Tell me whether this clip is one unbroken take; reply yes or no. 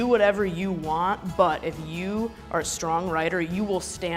yes